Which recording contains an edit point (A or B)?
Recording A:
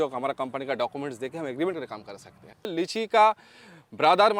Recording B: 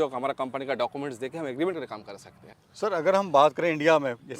A